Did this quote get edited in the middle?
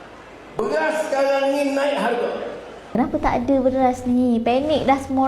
yes; 1 cut; at 2.8 s

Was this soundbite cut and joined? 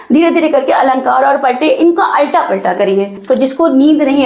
yes; 1 cut; at 3.1 s

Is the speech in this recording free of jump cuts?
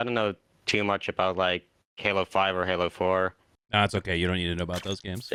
yes; 0 cuts

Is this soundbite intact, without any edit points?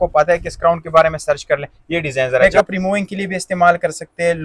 no; 1 cut; at 2.4 s

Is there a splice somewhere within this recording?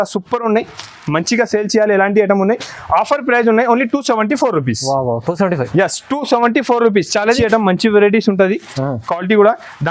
yes; 1 cut; at 7.4 s

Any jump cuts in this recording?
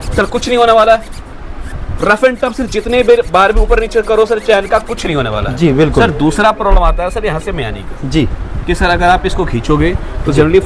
no; 0 cuts

